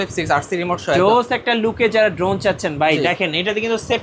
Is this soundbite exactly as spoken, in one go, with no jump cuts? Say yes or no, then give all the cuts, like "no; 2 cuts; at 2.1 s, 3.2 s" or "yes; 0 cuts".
yes; 0 cuts